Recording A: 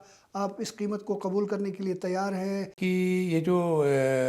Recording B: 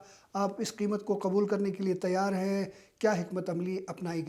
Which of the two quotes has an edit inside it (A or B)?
A